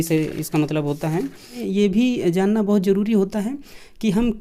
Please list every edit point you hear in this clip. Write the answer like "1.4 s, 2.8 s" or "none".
1.6 s